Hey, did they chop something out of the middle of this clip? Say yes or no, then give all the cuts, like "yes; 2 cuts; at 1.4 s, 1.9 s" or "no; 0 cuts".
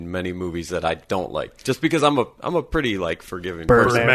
no; 0 cuts